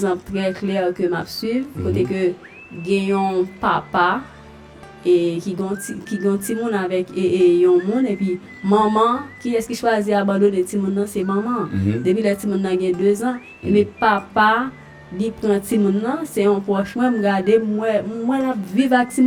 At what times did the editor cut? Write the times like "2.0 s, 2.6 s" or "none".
none